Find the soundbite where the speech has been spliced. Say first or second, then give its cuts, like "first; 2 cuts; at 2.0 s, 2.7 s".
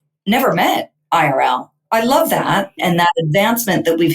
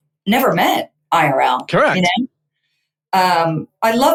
first; 2 cuts; at 1.7 s, 2.8 s